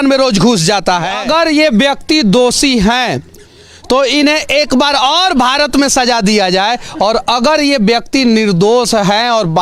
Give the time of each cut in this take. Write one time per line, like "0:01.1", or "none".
0:01.2